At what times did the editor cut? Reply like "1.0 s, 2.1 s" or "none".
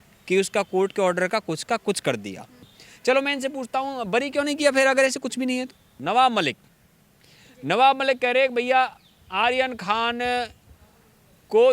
2.7 s, 5.9 s